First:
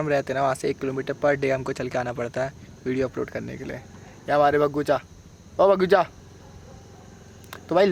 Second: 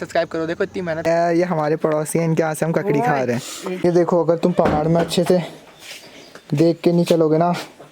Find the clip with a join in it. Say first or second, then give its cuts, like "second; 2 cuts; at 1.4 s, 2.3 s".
second; 2 cuts; at 1.1 s, 3.6 s